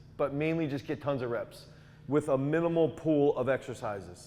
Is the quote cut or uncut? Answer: uncut